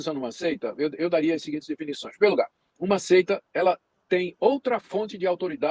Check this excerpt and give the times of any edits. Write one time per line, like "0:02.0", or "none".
none